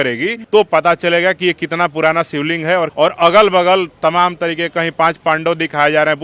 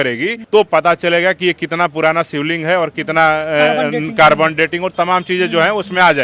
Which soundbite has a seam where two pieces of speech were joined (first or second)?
first